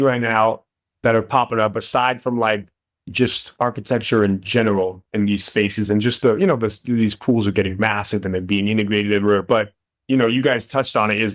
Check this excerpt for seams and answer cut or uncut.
uncut